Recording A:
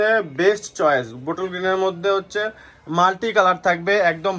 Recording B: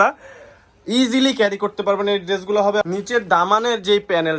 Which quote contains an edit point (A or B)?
B